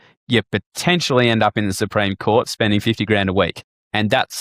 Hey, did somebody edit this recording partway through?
no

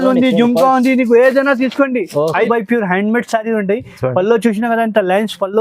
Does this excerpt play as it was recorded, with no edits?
no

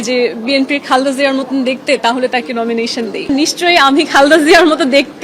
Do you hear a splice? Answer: yes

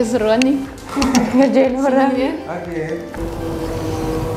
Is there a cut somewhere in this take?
yes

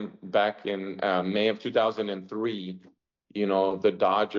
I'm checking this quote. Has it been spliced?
no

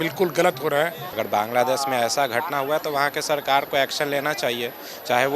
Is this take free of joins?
no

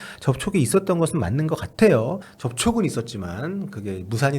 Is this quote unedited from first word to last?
no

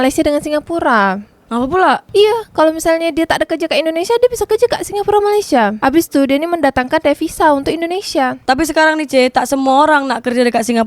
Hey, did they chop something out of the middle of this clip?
yes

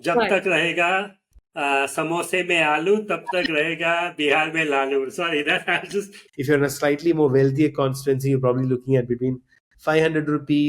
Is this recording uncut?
no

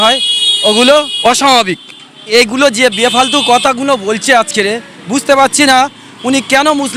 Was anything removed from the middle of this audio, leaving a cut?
yes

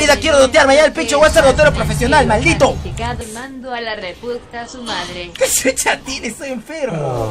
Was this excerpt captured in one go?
no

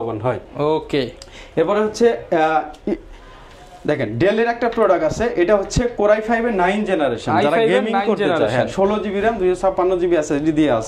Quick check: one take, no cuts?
yes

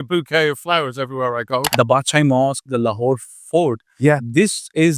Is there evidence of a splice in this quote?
yes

